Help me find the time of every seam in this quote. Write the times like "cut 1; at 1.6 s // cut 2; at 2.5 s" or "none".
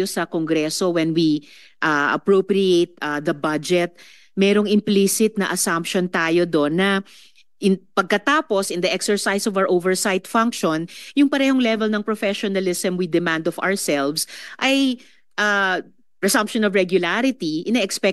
none